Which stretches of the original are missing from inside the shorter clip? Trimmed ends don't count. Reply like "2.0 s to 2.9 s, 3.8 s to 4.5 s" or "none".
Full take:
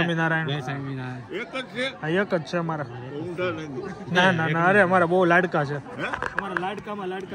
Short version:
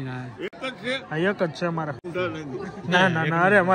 2.9 s to 3.3 s